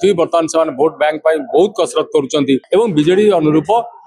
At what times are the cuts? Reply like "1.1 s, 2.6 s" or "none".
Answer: 2.6 s